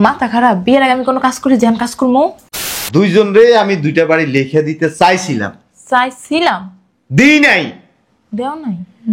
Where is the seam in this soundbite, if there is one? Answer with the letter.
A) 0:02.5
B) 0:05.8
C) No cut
A